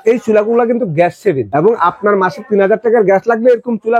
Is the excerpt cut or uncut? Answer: cut